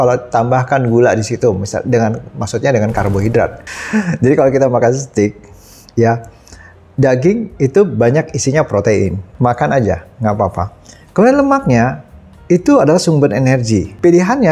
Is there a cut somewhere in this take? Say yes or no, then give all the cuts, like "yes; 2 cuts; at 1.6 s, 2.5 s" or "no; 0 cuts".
yes; 1 cut; at 3.6 s